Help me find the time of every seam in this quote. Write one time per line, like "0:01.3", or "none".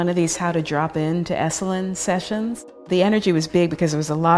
0:02.9